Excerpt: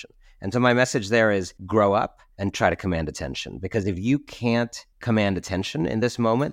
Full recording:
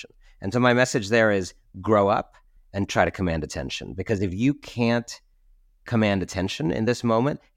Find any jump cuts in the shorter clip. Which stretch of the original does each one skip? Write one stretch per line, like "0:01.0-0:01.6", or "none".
0:01.6-0:01.7
0:02.4-0:02.6
0:05.2-0:05.7